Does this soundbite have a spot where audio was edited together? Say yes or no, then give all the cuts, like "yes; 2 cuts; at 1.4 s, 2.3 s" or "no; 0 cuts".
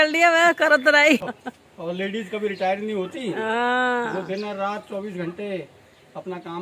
yes; 1 cut; at 1.2 s